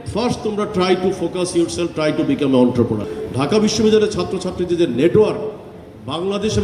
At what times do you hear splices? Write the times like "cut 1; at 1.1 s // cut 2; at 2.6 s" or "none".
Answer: cut 1; at 3.1 s